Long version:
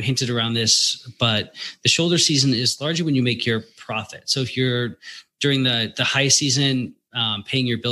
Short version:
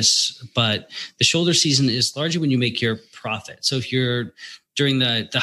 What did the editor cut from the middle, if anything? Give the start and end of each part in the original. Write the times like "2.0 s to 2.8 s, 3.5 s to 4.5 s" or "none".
none